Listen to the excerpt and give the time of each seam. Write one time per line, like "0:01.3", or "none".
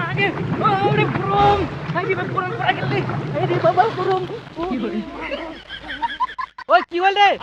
0:04.7
0:06.6